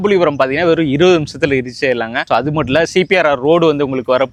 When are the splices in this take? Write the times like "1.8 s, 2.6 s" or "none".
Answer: none